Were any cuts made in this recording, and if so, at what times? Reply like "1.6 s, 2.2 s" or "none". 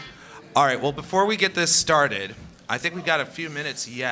none

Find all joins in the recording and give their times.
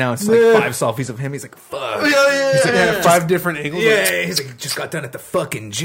none

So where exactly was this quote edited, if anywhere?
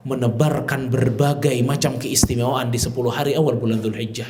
none

